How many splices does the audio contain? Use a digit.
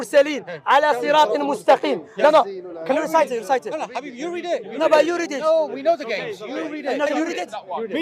1